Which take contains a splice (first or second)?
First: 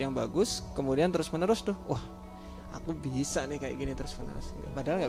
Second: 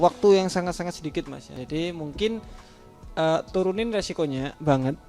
second